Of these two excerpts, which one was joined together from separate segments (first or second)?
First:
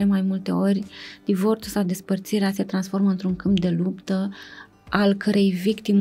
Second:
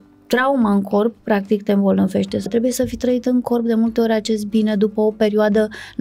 second